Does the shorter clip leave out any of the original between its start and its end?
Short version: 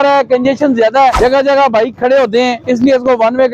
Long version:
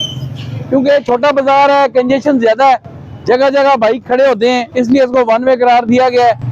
yes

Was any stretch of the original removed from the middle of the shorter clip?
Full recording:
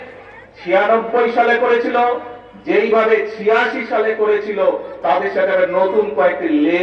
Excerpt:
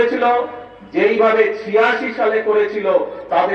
no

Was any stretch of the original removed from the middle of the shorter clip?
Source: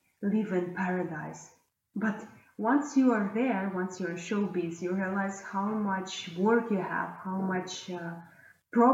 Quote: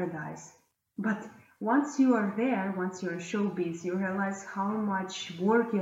no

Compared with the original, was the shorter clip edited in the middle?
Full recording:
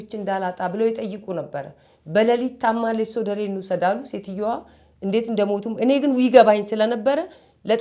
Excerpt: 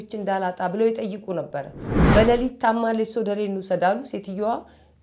no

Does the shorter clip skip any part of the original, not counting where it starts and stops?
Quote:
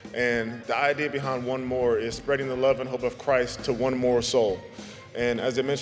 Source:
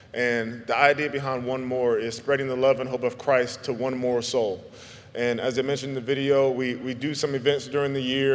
no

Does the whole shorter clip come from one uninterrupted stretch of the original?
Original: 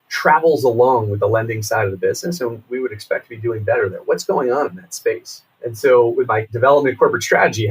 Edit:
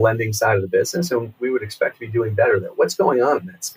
yes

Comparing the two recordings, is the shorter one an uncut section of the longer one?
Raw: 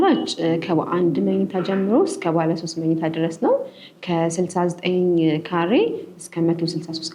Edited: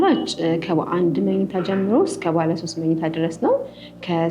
yes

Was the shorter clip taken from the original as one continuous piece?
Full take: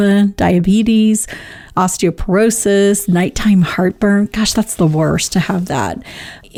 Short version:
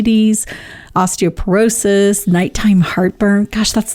yes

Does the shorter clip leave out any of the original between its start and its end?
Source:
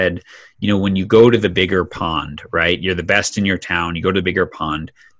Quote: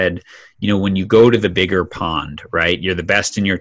no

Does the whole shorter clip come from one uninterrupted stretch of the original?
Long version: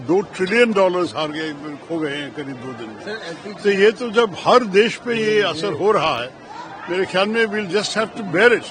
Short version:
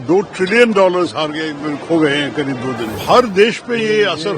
no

